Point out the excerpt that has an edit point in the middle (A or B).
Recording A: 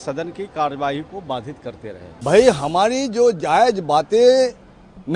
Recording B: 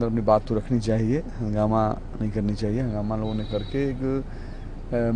A